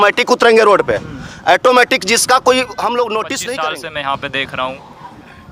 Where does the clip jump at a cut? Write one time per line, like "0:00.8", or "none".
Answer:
0:03.4